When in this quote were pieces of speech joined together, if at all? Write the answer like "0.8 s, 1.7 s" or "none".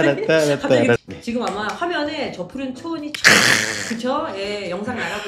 1.0 s